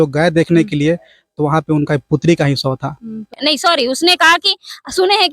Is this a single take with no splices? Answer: no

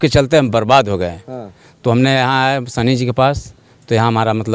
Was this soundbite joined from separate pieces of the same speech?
no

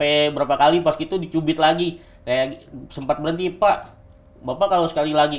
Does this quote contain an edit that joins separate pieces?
no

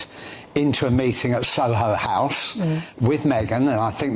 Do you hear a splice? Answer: no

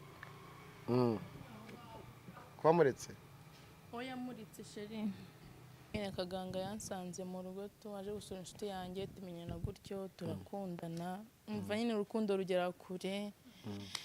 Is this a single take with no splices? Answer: no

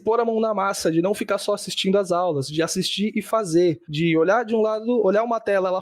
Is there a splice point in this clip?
no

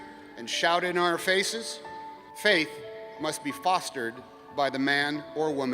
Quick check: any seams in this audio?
yes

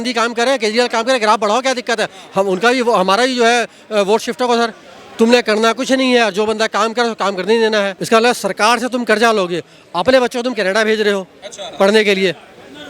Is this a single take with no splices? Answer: no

